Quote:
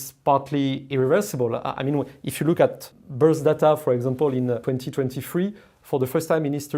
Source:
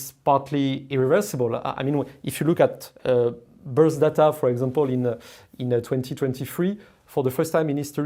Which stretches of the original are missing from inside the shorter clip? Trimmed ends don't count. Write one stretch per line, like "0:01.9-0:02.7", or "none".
0:02.9-0:03.5
0:05.2-0:05.9

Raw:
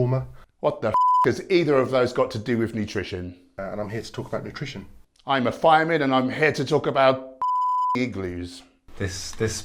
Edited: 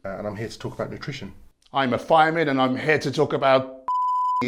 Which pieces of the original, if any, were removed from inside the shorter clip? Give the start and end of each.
none

